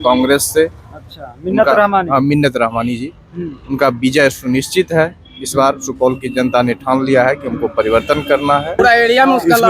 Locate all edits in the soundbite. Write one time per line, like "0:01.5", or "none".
0:08.8